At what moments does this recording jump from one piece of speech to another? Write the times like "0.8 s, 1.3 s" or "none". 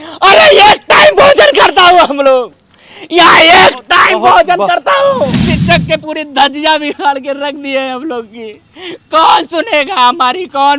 5.4 s